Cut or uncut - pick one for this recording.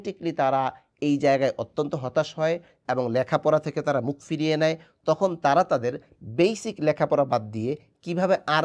uncut